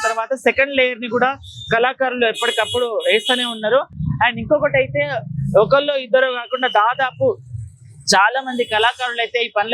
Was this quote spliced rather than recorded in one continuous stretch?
no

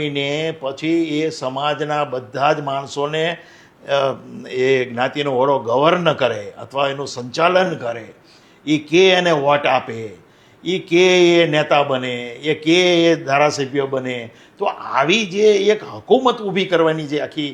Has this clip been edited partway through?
no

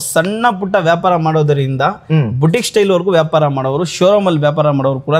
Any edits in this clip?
no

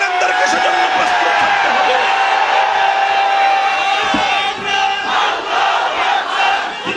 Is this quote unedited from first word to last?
yes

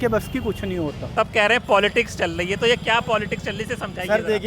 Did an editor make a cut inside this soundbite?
yes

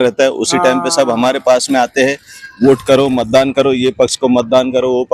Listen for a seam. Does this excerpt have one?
no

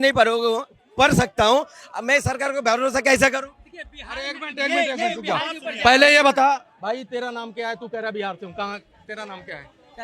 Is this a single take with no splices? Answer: yes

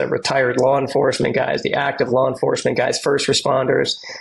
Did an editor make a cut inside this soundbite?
no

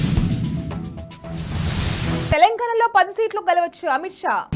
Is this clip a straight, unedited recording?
yes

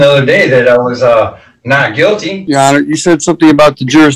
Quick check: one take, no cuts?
no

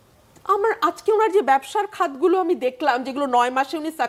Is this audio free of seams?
yes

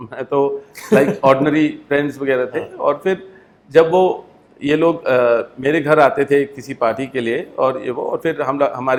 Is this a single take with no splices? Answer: yes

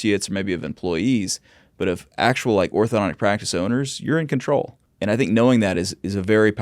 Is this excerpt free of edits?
no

